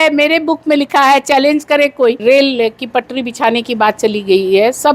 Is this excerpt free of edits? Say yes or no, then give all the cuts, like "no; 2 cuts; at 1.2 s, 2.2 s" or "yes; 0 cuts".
no; 1 cut; at 2.2 s